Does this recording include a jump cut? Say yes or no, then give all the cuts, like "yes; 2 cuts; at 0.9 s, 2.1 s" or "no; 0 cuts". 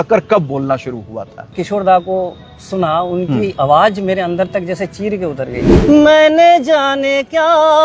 yes; 2 cuts; at 1.5 s, 5.7 s